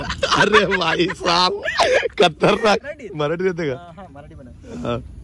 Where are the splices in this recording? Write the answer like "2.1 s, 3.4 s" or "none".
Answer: 2.8 s